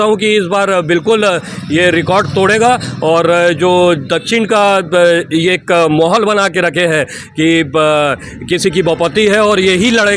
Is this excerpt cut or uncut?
uncut